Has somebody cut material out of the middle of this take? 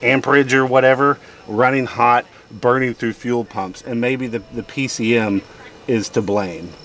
no; 0 cuts

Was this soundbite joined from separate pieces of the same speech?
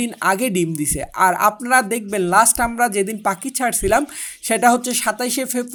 no; 0 cuts

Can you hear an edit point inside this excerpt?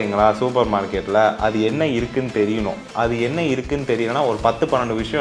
no; 0 cuts

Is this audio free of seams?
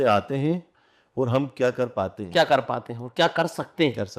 yes; 0 cuts

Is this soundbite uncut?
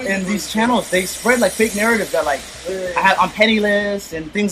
yes; 0 cuts

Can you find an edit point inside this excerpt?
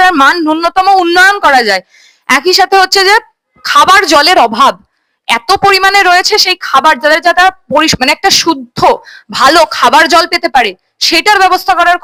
no; 0 cuts

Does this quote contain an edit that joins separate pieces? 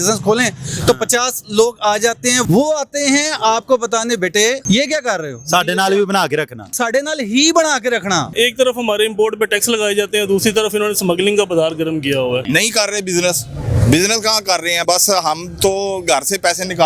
yes; 6 cuts; at 2.4 s, 4.6 s, 6.7 s, 8.3 s, 12.4 s, 14.8 s

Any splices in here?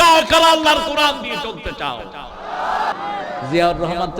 yes; 1 cut; at 2.9 s

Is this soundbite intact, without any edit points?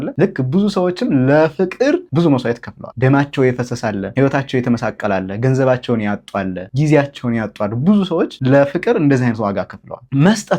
yes; 0 cuts

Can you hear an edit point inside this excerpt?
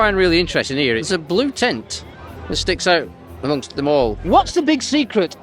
yes; 2 cuts; at 1.0 s, 4.2 s

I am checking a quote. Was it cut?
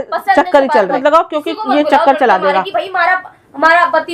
yes; 1 cut; at 1.0 s

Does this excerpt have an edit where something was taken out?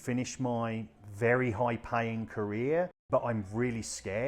yes; 2 cuts; at 1.0 s, 3.0 s

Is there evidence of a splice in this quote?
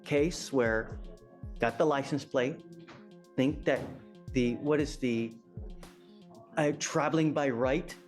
no; 0 cuts

